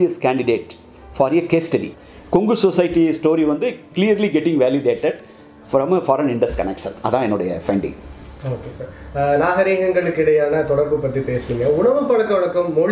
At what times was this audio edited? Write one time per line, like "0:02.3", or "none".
none